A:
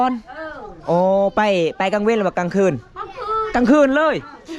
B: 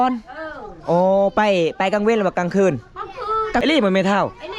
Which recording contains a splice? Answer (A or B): B